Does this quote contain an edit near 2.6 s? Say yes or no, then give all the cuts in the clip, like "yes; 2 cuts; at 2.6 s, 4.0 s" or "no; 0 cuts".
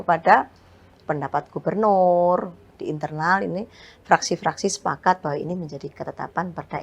yes; 1 cut; at 2.6 s